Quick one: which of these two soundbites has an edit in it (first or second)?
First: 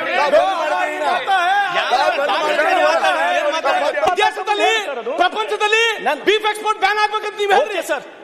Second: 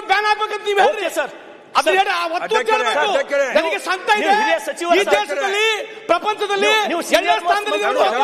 first